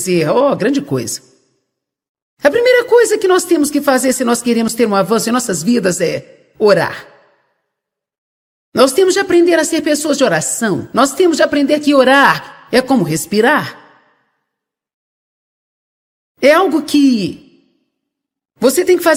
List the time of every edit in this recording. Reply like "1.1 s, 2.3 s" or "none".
none